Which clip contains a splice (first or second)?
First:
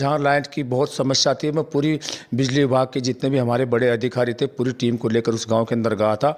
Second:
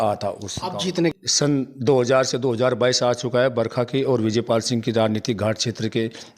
second